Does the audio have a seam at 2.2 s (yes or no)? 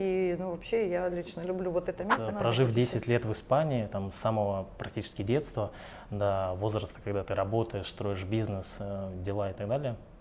yes